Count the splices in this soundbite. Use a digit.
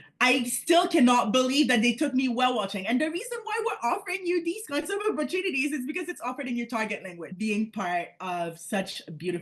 1